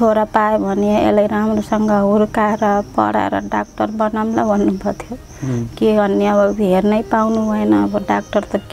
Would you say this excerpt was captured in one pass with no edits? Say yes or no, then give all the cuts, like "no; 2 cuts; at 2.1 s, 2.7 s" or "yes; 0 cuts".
yes; 0 cuts